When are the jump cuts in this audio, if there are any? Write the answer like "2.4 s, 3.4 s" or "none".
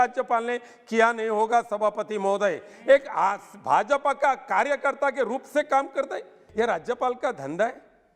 6.4 s